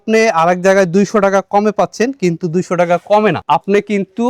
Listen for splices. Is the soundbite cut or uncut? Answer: uncut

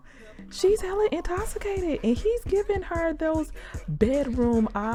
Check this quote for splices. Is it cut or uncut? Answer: uncut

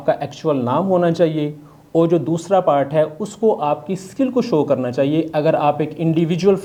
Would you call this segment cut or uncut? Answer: uncut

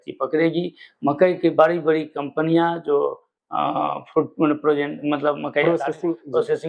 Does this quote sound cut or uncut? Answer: uncut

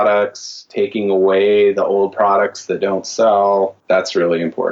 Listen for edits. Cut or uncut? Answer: cut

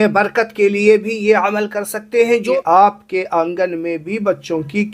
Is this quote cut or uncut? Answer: cut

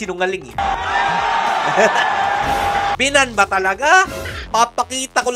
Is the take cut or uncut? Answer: cut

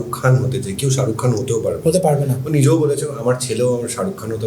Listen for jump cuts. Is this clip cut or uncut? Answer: uncut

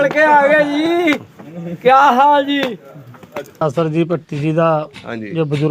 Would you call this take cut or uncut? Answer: cut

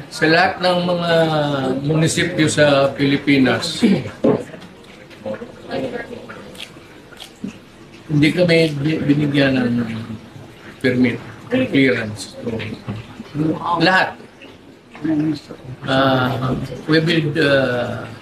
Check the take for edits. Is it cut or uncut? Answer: uncut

